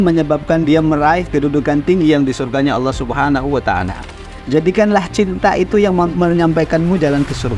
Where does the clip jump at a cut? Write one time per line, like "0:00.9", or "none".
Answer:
0:04.0
0:06.1